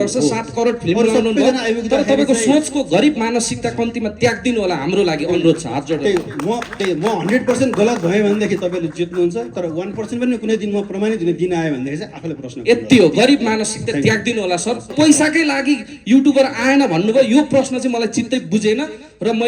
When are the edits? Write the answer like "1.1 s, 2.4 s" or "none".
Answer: 14.9 s